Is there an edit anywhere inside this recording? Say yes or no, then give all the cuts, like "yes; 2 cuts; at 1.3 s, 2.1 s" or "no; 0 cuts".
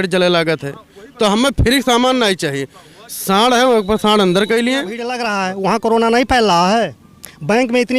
yes; 1 cut; at 5.2 s